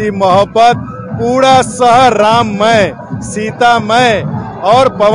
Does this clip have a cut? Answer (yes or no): no